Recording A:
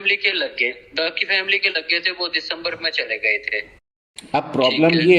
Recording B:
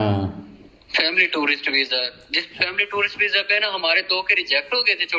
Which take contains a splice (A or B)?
A